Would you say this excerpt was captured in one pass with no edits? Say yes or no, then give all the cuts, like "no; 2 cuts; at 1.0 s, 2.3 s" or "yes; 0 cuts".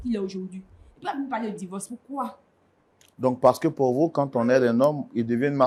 yes; 0 cuts